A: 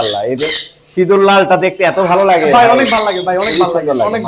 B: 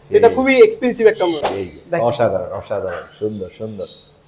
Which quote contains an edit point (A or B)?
B